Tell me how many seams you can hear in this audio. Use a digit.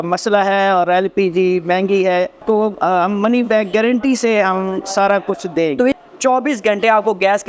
2